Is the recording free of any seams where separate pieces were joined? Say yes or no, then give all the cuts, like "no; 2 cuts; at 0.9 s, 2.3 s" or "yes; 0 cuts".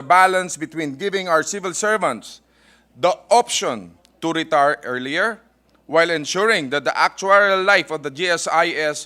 yes; 0 cuts